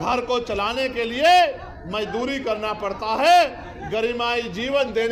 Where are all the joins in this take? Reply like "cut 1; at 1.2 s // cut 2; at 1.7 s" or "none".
none